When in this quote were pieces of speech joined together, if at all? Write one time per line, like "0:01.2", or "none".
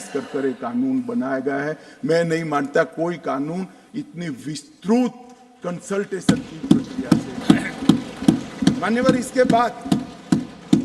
none